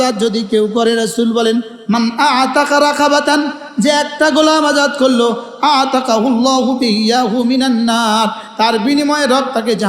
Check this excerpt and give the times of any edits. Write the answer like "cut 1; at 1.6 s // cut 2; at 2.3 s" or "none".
none